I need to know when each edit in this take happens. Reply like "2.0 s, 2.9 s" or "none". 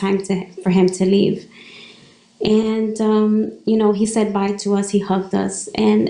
none